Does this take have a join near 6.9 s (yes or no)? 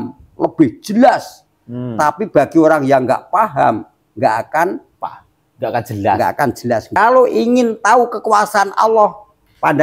yes